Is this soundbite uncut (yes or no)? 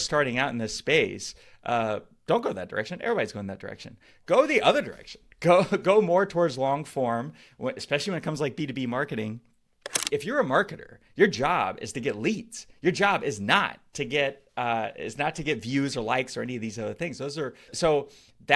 no